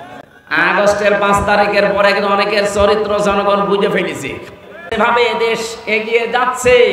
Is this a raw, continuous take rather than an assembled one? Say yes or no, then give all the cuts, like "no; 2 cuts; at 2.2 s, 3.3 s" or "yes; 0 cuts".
no; 1 cut; at 4.9 s